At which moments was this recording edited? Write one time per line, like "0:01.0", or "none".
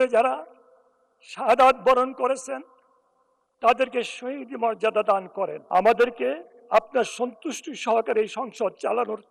0:05.6